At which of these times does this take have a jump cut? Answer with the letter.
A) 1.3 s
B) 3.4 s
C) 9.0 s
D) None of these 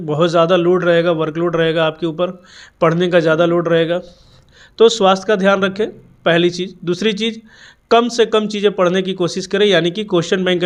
D